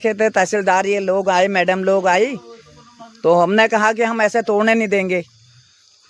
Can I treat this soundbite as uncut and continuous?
yes; 0 cuts

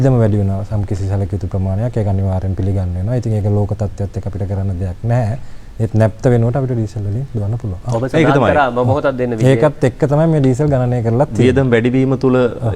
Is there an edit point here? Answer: no; 0 cuts

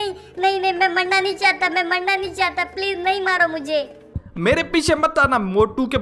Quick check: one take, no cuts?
no; 1 cut; at 4.1 s

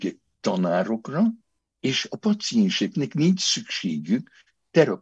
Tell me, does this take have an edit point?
no; 0 cuts

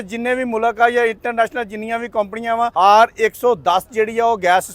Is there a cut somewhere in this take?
yes; 1 cut; at 2.7 s

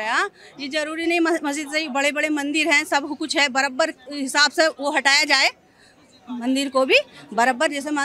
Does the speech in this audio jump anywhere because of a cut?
no; 0 cuts

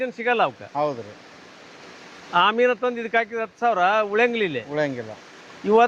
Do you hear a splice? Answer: no; 0 cuts

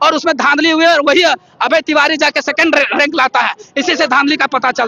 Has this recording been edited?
no; 0 cuts

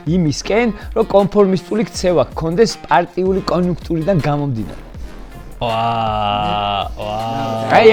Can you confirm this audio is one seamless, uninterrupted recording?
yes; 0 cuts

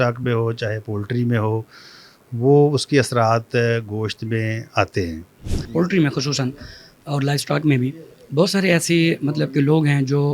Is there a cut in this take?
yes; 1 cut; at 5.6 s

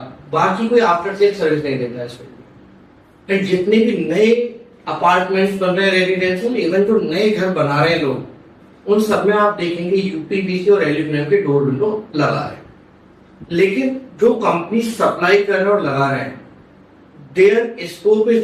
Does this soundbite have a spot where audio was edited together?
no; 0 cuts

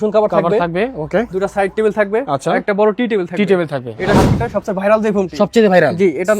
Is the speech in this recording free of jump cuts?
no; 1 cut; at 4.2 s

